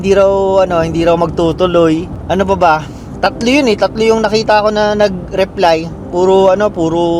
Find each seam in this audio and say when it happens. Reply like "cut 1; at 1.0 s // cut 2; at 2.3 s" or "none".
none